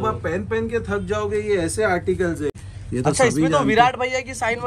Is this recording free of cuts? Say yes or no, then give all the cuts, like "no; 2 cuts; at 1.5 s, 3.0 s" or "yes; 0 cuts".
no; 1 cut; at 2.5 s